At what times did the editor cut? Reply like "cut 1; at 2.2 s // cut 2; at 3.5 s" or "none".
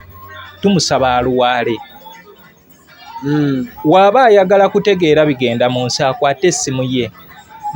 none